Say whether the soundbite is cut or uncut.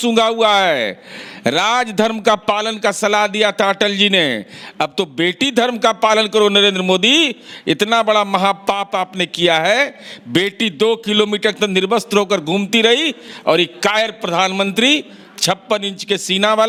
uncut